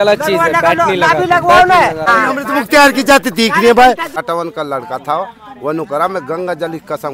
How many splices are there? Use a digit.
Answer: 2